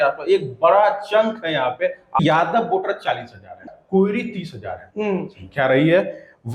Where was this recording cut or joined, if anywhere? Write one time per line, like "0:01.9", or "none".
0:02.2
0:03.7